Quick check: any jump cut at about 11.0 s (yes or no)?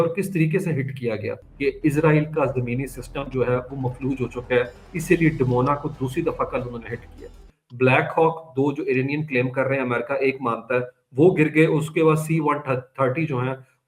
no